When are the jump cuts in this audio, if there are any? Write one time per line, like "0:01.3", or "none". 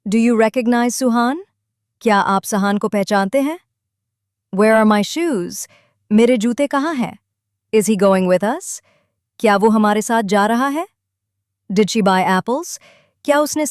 none